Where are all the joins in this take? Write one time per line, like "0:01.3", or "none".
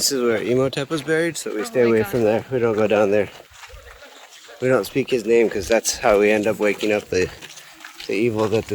none